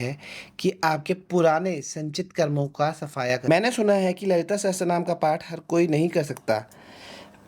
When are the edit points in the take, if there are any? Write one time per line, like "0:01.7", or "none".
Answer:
0:03.5